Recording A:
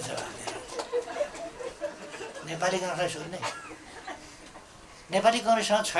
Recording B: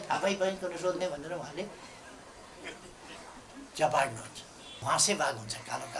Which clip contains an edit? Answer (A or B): B